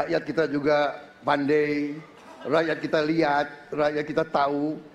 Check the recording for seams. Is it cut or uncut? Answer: uncut